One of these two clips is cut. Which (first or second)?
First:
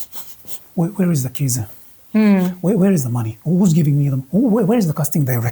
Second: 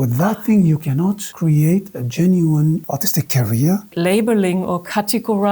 second